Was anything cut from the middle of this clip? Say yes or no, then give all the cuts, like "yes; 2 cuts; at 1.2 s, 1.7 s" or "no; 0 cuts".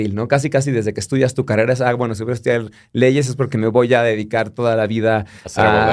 no; 0 cuts